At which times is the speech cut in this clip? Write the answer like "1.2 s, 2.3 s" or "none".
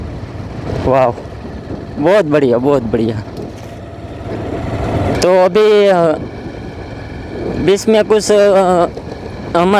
none